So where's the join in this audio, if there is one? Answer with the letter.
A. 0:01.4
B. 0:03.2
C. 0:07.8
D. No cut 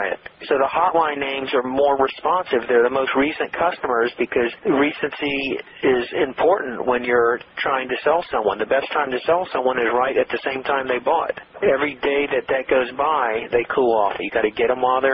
D